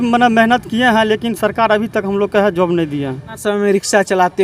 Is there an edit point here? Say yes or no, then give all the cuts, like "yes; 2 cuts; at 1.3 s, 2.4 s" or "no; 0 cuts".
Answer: yes; 1 cut; at 3.3 s